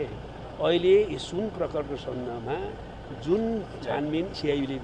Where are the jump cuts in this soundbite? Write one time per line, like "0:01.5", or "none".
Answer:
none

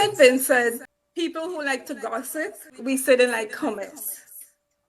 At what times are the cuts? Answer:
0:00.9
0:02.7

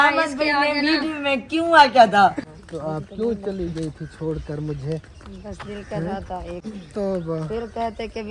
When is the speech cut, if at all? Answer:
0:02.4
0:06.6

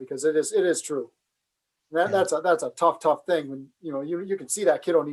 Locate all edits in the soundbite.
none

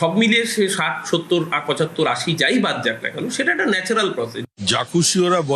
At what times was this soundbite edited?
0:04.3

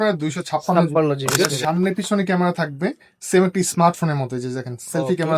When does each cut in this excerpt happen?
0:01.3

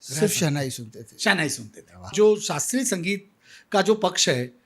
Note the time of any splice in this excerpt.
0:02.1

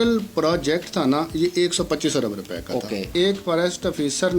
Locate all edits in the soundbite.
0:03.1

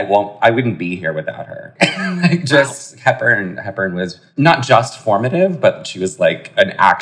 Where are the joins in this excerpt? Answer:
0:01.7
0:04.2

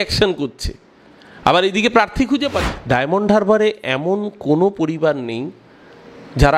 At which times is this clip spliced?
0:02.7

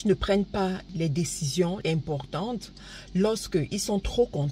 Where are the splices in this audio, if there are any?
0:00.9
0:01.8

